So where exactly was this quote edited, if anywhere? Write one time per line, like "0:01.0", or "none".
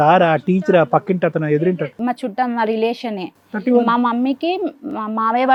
none